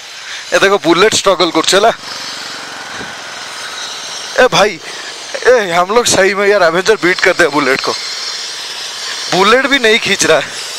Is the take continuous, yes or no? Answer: yes